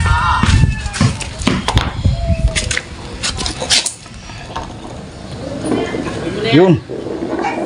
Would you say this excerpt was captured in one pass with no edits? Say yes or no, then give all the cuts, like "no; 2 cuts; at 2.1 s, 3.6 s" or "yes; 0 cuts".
yes; 0 cuts